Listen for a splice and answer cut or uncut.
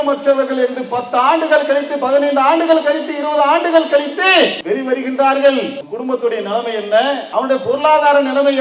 cut